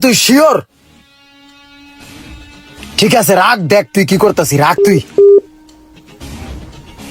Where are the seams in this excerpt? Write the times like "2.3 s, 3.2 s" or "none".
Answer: none